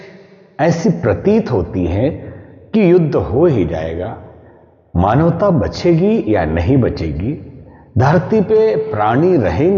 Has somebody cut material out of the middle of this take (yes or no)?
no